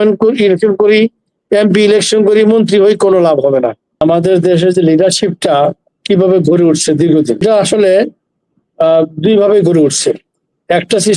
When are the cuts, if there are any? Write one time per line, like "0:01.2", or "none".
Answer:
0:04.0
0:07.4

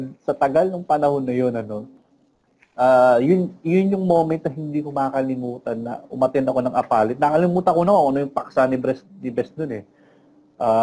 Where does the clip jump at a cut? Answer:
none

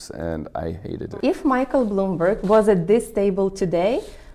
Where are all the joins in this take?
0:01.1
0:02.4

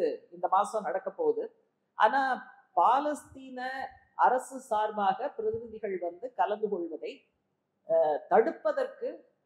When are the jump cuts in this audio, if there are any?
none

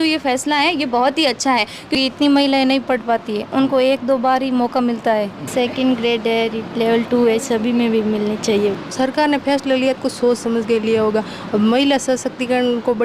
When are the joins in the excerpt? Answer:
0:01.9
0:05.4
0:08.8

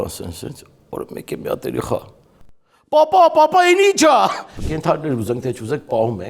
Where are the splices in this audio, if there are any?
0:04.5

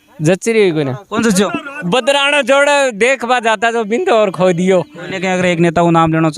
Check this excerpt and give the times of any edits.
0:05.0

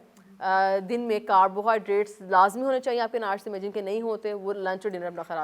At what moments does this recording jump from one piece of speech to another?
none

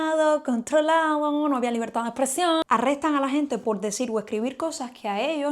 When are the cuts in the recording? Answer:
0:02.6

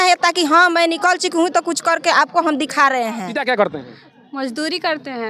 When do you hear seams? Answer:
0:03.3

